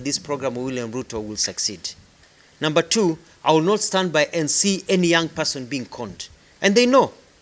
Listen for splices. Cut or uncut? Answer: uncut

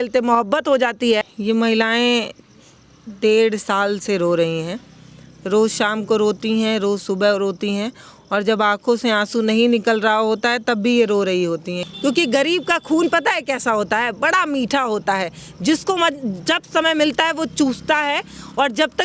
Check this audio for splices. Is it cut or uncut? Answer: cut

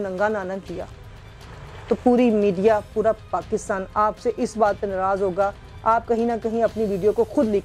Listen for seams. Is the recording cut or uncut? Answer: uncut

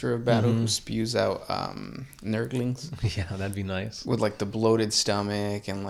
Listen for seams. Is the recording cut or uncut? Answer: uncut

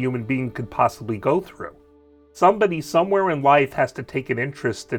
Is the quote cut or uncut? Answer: cut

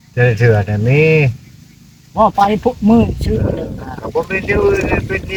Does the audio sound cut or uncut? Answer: uncut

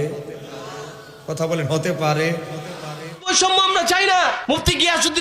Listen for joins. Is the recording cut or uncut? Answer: cut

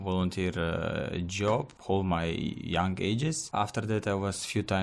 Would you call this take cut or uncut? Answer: cut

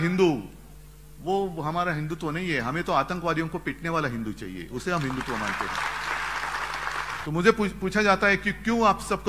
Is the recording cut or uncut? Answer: cut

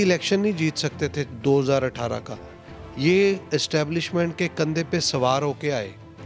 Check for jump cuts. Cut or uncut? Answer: uncut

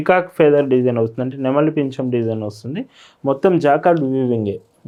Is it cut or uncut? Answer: uncut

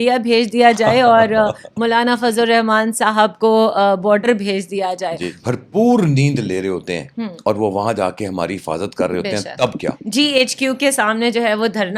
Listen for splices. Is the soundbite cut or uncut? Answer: cut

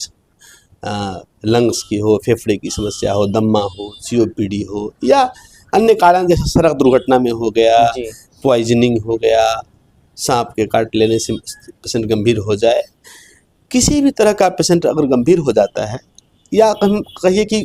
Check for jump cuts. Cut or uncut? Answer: uncut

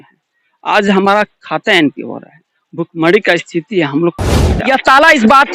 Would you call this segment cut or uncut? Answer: cut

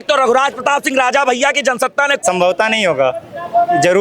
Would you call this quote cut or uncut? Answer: cut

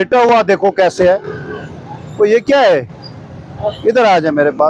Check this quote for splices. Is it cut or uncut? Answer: uncut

